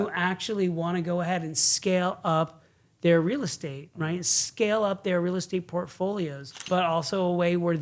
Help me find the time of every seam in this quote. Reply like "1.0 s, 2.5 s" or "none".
6.5 s